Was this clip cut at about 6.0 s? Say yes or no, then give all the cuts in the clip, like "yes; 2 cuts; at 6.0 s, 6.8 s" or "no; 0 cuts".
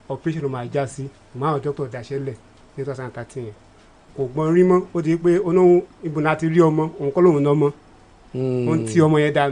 no; 1 cut; at 3.9 s